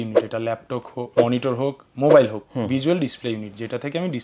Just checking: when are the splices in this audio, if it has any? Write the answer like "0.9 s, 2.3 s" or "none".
1.1 s